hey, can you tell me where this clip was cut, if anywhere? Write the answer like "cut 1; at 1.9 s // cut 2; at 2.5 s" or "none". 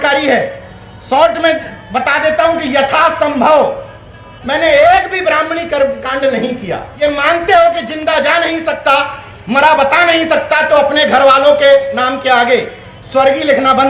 cut 1; at 6.8 s